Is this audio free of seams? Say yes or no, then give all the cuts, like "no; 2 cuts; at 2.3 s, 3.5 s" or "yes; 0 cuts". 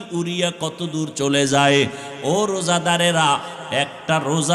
yes; 0 cuts